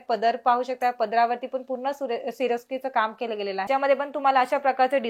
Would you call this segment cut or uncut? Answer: cut